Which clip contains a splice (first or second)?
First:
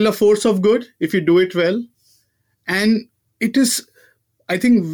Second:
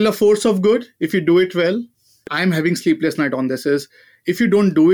second